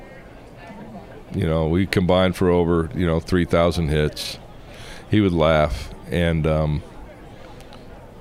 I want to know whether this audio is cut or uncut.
uncut